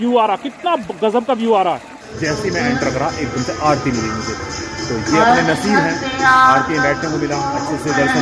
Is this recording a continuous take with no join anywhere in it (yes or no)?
no